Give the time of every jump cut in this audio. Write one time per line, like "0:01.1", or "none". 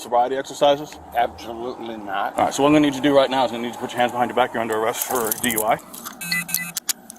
0:02.3
0:05.9